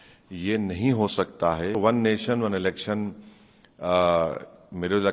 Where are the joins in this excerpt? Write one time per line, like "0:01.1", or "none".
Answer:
0:01.8